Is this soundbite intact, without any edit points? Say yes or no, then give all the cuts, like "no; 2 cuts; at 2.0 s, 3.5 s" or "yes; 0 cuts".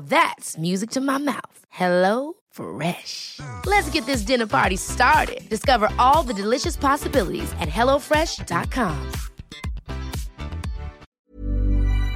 no; 1 cut; at 11.1 s